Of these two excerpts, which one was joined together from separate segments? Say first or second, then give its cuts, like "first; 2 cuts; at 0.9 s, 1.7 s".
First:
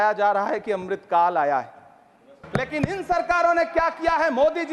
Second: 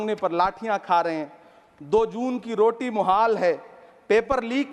first; 1 cut; at 2.4 s